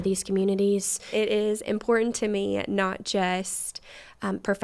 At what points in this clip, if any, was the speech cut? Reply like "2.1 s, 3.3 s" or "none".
1.0 s